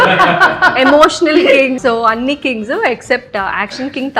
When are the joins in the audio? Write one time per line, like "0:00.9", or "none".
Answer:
0:01.8